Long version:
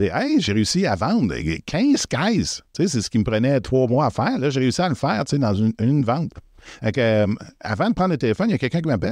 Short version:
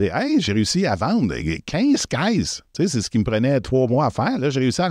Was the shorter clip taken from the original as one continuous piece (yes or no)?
yes